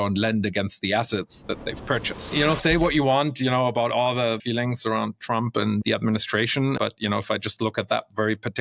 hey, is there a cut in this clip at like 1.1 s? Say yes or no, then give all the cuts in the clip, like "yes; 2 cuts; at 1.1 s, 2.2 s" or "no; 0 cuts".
no; 4 cuts; at 2.3 s, 4.4 s, 5.8 s, 6.8 s